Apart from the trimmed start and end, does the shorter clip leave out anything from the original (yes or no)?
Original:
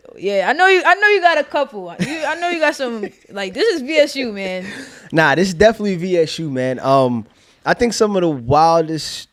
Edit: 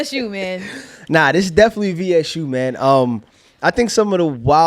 no